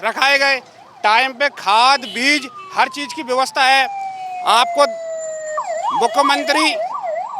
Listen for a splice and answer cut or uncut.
uncut